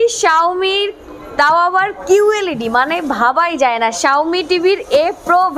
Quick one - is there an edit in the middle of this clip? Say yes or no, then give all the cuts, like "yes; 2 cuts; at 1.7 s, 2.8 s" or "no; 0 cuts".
no; 0 cuts